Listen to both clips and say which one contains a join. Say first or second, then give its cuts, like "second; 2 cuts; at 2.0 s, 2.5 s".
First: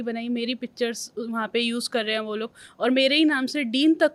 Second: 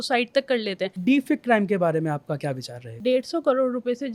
second; 2 cuts; at 0.9 s, 2.9 s